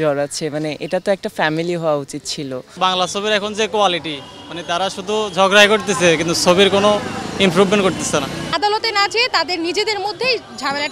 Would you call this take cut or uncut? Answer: cut